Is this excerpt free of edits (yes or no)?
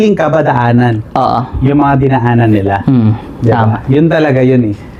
yes